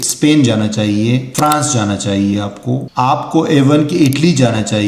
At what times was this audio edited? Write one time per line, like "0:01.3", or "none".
0:01.3
0:02.9

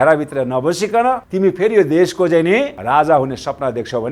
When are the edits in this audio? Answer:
0:01.3
0:02.8

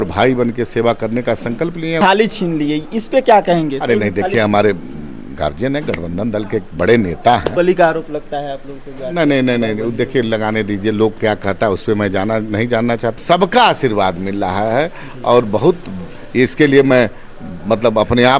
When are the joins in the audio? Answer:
0:01.9
0:07.5
0:13.2

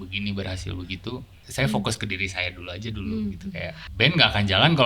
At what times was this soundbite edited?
0:01.4
0:03.8

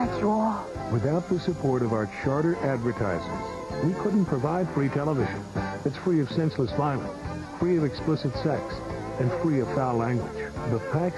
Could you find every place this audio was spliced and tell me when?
0:08.0

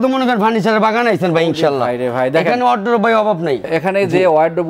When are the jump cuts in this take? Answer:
none

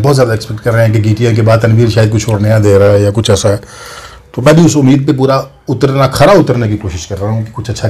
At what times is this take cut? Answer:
none

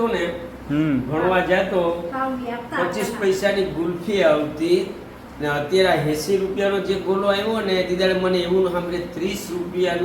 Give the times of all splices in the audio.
none

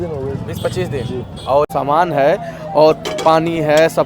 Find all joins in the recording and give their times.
0:01.7

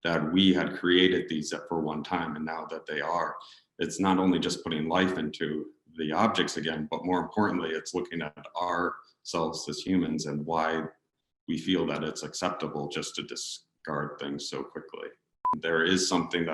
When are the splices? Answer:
0:15.6

